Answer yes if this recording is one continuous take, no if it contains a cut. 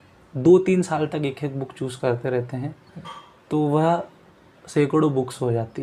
yes